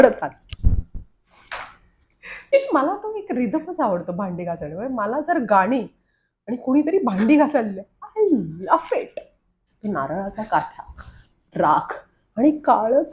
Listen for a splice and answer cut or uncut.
cut